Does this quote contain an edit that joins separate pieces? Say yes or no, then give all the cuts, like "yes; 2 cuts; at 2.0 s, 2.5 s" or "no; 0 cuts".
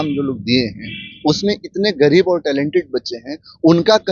no; 0 cuts